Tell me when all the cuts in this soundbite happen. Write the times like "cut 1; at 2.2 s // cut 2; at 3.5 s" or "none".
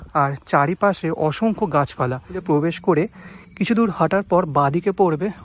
cut 1; at 2.4 s